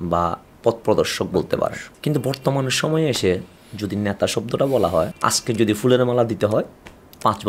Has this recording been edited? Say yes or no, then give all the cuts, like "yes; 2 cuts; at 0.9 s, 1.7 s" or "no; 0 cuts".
yes; 2 cuts; at 1.9 s, 5.2 s